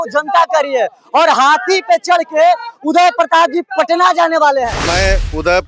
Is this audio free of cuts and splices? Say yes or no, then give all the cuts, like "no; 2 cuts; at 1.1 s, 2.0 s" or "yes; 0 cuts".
no; 1 cut; at 4.8 s